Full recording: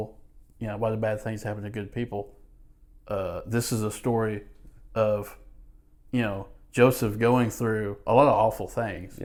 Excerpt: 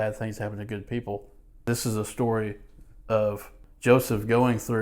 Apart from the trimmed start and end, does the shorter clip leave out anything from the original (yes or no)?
yes